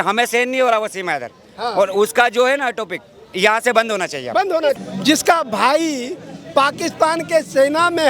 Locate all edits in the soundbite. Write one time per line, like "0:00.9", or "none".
0:04.8